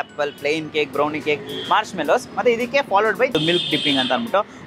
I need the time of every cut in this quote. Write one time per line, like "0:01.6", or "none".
0:03.3